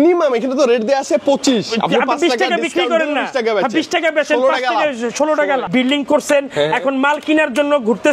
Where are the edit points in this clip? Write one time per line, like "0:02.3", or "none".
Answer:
0:05.7